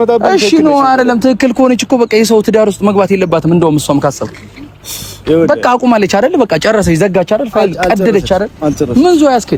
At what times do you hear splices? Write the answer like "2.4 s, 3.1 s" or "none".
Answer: none

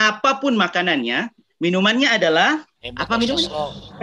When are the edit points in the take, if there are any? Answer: 2.8 s

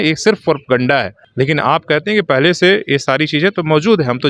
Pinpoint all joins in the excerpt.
1.2 s

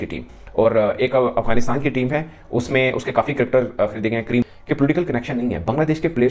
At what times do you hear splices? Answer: 4.5 s

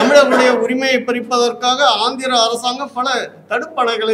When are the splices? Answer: none

